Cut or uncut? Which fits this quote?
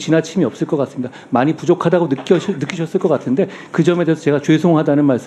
uncut